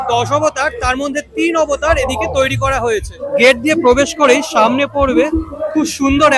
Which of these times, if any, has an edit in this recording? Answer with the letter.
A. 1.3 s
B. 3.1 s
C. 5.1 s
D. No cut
B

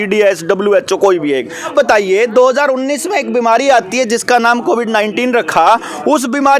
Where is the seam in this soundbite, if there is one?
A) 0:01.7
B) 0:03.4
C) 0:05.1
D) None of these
A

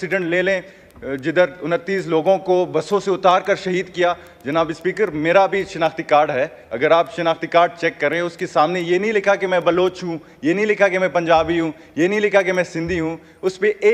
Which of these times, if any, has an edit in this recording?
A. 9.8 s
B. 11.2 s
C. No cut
C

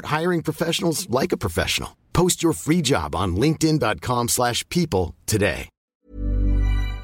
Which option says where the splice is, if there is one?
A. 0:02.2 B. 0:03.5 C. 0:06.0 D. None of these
C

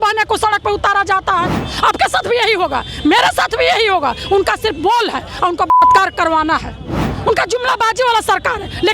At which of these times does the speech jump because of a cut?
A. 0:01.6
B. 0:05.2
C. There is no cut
A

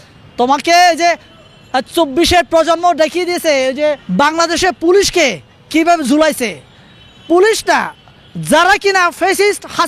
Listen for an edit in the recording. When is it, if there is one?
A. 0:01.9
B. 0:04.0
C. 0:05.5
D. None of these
B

